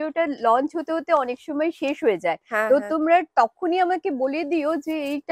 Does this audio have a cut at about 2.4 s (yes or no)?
no